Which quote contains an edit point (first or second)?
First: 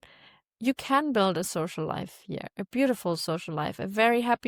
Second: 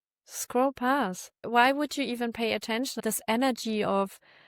second